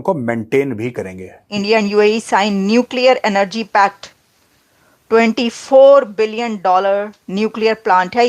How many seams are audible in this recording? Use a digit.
1